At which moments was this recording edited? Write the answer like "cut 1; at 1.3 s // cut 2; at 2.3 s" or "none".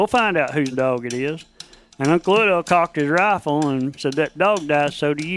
cut 1; at 4.0 s